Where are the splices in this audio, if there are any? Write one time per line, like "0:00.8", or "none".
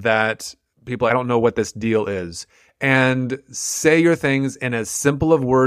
0:01.1